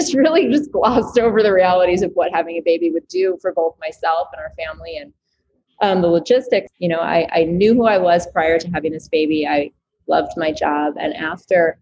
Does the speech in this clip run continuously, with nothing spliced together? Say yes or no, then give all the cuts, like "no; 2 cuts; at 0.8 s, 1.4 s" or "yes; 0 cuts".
no; 1 cut; at 6.7 s